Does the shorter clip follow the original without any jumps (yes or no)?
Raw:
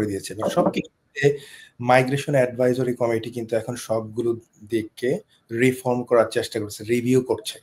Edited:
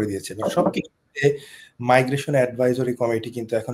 yes